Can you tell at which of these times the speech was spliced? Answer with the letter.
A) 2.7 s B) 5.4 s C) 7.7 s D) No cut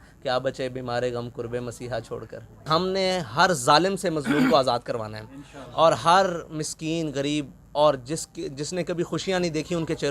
A